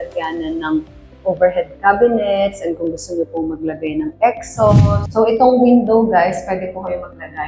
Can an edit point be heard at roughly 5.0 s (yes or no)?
yes